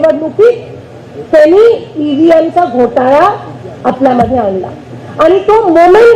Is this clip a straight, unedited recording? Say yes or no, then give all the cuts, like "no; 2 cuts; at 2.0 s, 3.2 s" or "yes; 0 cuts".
yes; 0 cuts